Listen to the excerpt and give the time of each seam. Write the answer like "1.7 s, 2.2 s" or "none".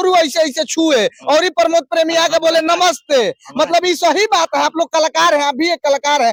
none